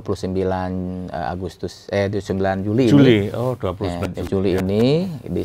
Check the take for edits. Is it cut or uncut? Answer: uncut